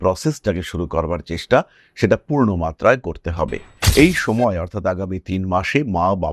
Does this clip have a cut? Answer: yes; 1 cut; at 3.7 s

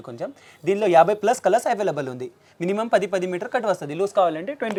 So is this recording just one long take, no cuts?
yes; 0 cuts

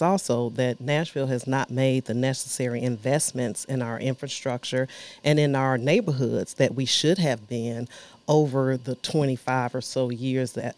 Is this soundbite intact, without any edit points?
yes; 0 cuts

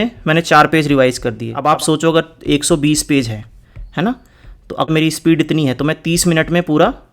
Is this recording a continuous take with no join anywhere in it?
no; 2 cuts; at 1.5 s, 4.9 s

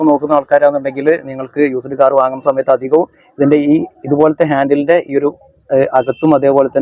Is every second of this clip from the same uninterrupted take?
yes; 0 cuts

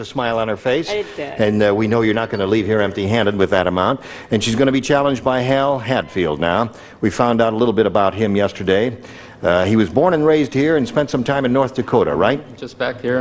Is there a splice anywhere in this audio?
no; 0 cuts

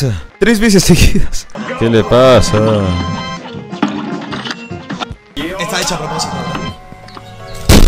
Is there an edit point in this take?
no; 0 cuts

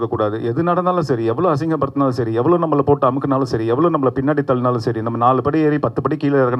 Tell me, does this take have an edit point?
no; 0 cuts

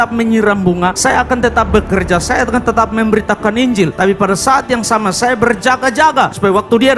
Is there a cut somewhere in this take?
no; 0 cuts

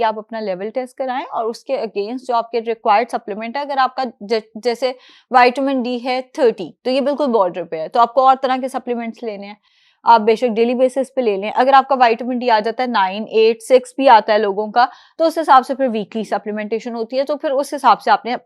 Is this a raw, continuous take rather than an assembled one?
yes; 0 cuts

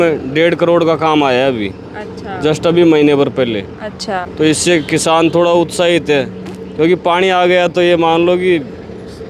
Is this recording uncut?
no; 1 cut; at 4.2 s

